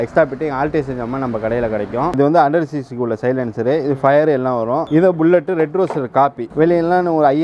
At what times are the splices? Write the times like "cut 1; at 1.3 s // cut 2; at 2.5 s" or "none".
cut 1; at 2.1 s // cut 2; at 4.8 s // cut 3; at 6.4 s